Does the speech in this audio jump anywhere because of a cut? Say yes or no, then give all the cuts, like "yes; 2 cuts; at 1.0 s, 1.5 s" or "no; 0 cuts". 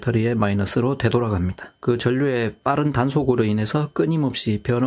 yes; 1 cut; at 1.7 s